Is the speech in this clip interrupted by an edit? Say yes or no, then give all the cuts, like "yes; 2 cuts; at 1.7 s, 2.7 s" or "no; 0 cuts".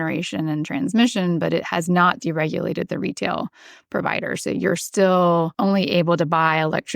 yes; 1 cut; at 5.5 s